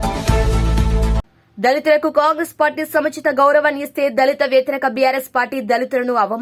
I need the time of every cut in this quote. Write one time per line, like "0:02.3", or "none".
0:01.3